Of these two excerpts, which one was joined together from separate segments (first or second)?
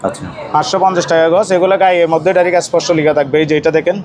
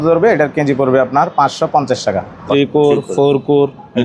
second